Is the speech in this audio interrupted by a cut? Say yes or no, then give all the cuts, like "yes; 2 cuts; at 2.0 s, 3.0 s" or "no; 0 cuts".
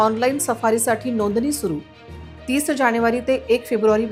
no; 0 cuts